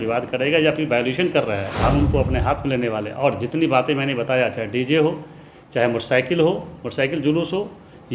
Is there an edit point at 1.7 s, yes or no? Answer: yes